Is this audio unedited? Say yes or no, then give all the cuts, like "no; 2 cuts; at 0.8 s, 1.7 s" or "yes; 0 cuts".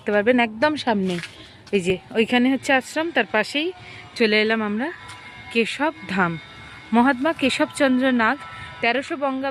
yes; 0 cuts